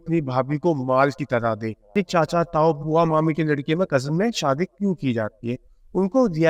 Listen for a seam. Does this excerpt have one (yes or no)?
yes